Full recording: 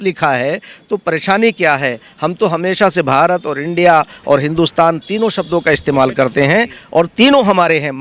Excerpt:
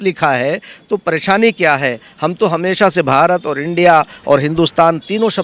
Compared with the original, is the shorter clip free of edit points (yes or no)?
yes